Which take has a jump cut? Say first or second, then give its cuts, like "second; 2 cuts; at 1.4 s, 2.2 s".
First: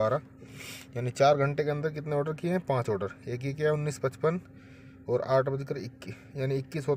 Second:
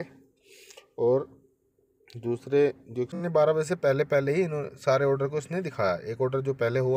second; 1 cut; at 3.2 s